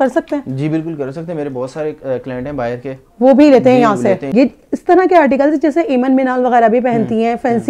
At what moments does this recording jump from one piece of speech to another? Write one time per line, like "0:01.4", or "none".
0:04.2